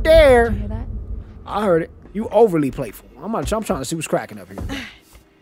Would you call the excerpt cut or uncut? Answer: cut